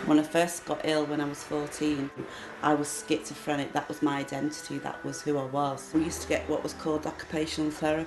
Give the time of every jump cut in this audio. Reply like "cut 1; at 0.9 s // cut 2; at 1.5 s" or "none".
cut 1; at 2.2 s // cut 2; at 5.9 s